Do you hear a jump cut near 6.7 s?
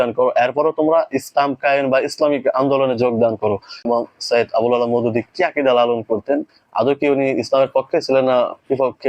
no; 1 cut; at 3.8 s

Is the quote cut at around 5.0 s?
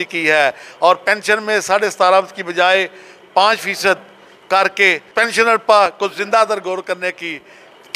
yes; 1 cut; at 5.0 s

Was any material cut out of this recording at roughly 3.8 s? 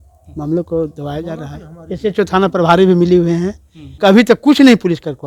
yes; 1 cut; at 3.8 s

